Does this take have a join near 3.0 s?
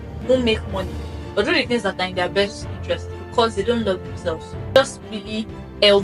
no; 1 cut; at 4.8 s

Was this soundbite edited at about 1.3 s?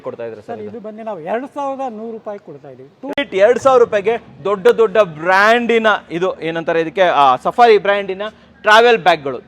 no; 1 cut; at 3.2 s

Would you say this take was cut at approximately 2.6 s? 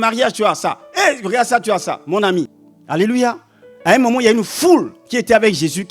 yes; 1 cut; at 2.6 s

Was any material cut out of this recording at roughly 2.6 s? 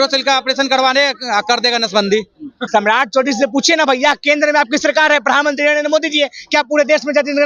yes; 1 cut; at 2.6 s

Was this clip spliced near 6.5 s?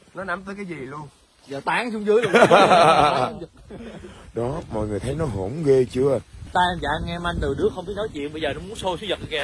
yes; 1 cut; at 6.5 s

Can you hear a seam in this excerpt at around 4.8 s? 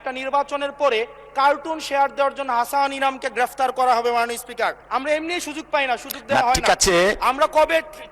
yes; 1 cut; at 4.8 s

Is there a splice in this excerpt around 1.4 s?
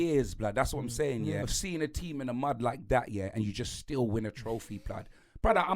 yes; 1 cut; at 1.4 s

